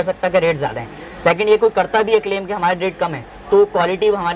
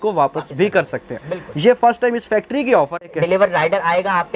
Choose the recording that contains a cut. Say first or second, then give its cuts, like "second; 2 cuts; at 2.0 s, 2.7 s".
second; 1 cut; at 3.1 s